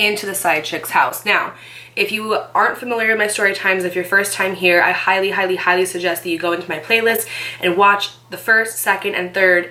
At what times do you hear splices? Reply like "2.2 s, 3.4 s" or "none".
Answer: none